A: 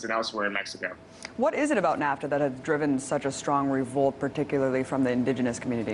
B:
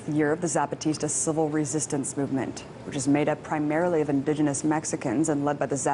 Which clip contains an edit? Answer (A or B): B